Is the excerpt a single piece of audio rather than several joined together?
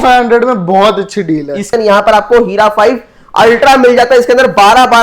no; 1 cut; at 1.7 s

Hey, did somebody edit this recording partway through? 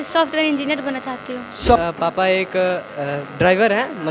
yes; 1 cut; at 1.8 s

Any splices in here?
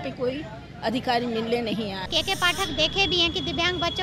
yes; 1 cut; at 2.1 s

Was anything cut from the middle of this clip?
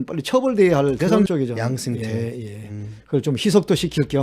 yes; 1 cut; at 1.3 s

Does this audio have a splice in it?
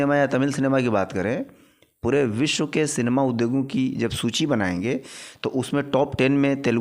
no; 0 cuts

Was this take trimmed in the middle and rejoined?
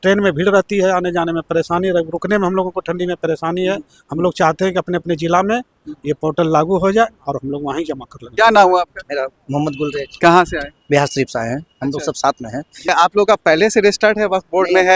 no; 0 cuts

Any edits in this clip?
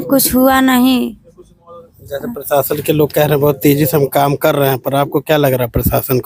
no; 0 cuts

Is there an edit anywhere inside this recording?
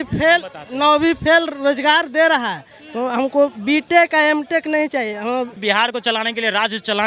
yes; 1 cut; at 5.6 s

